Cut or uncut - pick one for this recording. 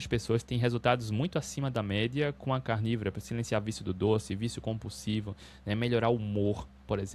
uncut